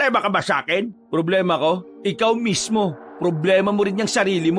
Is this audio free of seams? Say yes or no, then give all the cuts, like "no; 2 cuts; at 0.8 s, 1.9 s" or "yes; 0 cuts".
no; 3 cuts; at 1.0 s, 1.9 s, 3.0 s